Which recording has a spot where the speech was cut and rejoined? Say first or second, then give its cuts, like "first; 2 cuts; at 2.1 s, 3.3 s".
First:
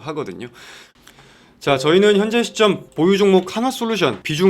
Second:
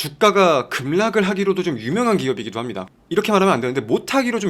first; 1 cut; at 1.0 s